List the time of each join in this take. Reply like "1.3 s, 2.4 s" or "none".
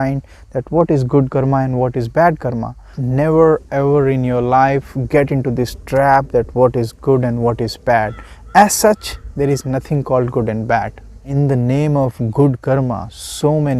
2.9 s, 11.2 s